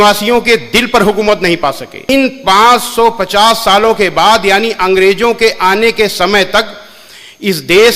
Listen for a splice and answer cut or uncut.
cut